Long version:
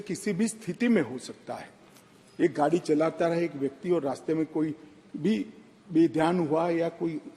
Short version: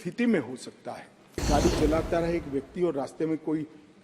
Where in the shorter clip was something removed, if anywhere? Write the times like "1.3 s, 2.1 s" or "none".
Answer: 1.4 s